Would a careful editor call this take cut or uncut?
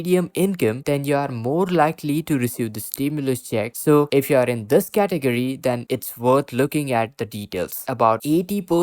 cut